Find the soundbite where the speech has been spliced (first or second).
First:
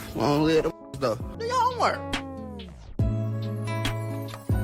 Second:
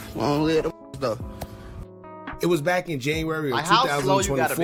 first